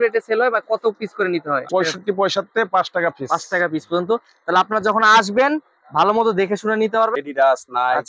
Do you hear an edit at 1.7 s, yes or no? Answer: yes